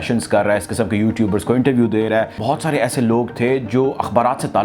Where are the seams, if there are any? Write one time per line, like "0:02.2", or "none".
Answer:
0:02.4